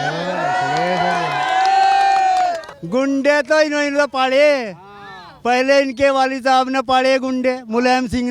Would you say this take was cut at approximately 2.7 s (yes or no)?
yes